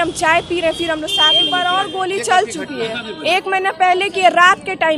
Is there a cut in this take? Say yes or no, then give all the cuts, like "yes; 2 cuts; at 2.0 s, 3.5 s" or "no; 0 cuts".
yes; 1 cut; at 1.4 s